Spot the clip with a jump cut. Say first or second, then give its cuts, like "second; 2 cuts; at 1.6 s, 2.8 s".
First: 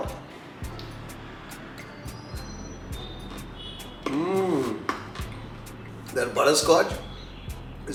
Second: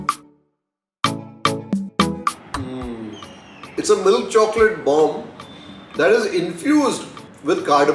second; 1 cut; at 3.8 s